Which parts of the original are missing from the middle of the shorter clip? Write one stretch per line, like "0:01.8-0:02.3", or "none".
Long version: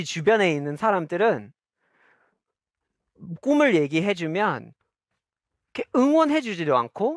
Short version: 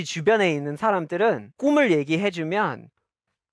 0:01.5-0:03.3